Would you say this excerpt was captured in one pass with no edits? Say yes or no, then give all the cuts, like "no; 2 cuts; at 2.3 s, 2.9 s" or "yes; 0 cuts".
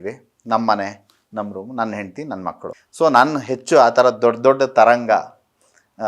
no; 1 cut; at 2.8 s